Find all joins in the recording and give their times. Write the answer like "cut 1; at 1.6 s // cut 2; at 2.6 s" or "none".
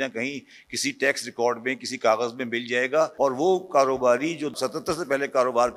cut 1; at 3.1 s // cut 2; at 4.6 s